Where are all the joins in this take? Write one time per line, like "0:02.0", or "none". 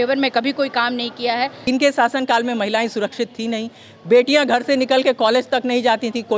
0:01.6